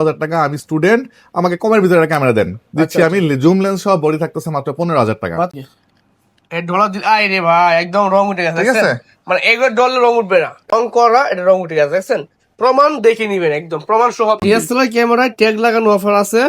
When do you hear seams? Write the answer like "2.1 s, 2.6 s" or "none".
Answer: 5.5 s, 10.7 s, 14.4 s